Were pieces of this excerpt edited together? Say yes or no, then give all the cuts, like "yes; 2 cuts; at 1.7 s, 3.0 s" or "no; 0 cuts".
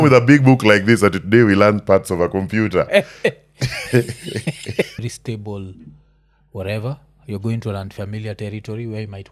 yes; 1 cut; at 5.0 s